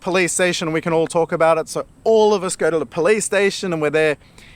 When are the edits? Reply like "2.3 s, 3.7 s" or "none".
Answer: none